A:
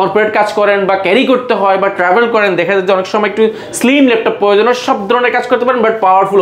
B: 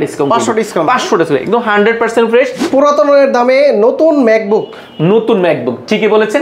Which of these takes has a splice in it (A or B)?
B